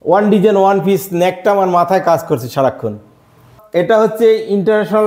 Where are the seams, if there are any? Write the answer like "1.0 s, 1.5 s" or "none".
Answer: 3.5 s